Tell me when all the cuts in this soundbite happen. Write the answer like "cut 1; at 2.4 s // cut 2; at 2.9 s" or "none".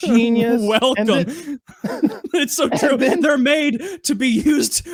none

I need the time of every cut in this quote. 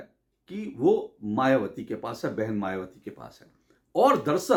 none

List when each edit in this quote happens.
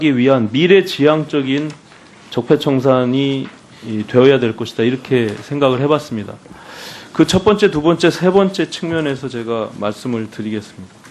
cut 1; at 8.2 s

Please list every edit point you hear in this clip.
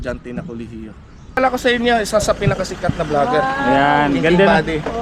cut 1; at 1.4 s

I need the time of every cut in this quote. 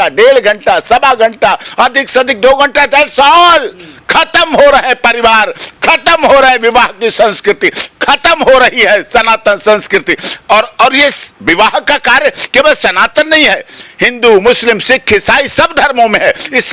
none

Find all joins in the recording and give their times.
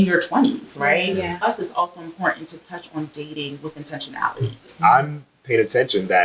cut 1; at 1.4 s // cut 2; at 4.7 s

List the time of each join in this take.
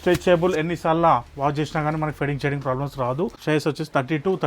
cut 1; at 3.4 s

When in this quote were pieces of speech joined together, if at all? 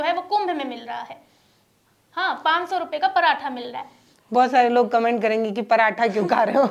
none

